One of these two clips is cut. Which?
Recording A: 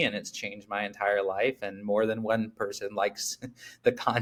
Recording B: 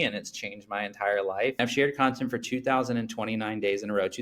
B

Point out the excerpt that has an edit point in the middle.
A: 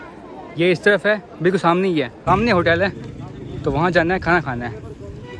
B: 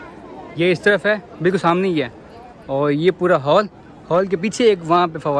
A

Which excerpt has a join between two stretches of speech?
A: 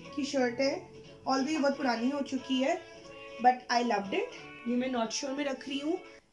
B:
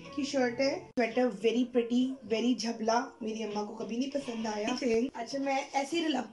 B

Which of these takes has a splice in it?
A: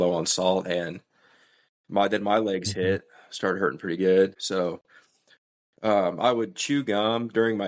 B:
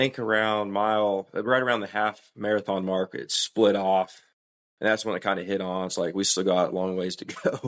A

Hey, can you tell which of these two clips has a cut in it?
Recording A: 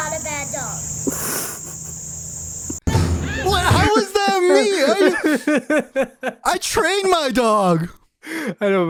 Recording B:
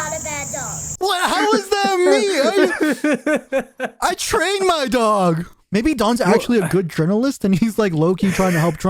B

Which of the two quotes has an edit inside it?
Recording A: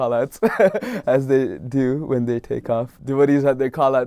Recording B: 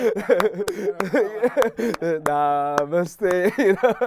A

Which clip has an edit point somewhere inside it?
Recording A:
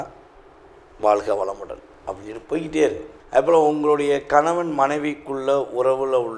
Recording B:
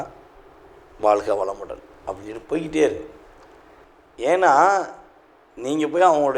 A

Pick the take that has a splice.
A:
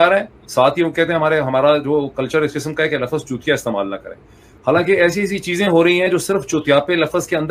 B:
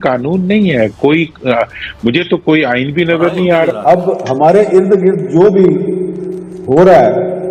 B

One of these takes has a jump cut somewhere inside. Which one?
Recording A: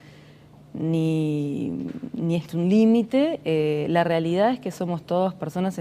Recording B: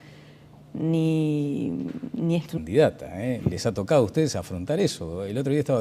A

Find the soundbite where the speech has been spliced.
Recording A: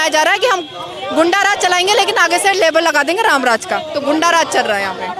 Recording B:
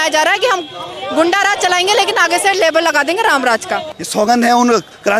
B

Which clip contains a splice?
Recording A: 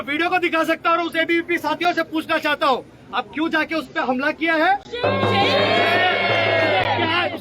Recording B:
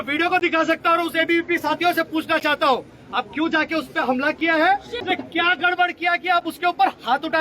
B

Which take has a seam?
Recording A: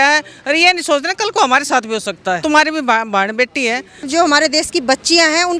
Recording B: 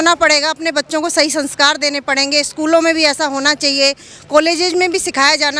A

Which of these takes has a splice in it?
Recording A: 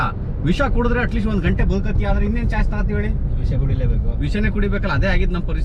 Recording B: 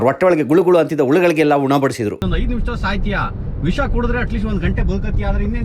B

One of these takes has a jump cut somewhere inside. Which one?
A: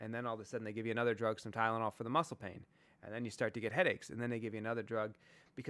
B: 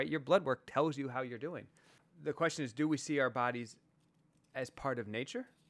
B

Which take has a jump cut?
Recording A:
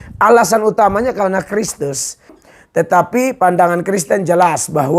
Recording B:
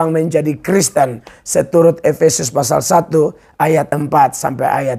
A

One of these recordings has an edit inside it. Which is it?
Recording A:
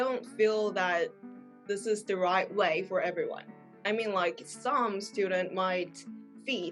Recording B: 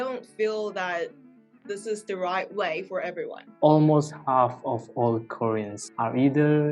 B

